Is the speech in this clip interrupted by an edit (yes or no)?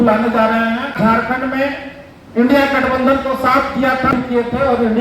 yes